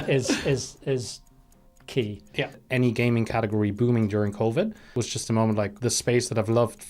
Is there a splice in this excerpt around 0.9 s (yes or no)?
no